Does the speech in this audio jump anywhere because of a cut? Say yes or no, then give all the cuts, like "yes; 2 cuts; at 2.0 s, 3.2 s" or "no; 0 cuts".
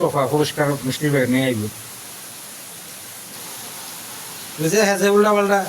yes; 1 cut; at 3.3 s